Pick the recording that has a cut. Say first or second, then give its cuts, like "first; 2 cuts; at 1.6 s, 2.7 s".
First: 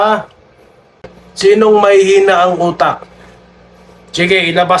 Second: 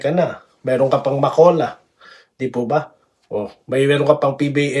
first; 1 cut; at 1.0 s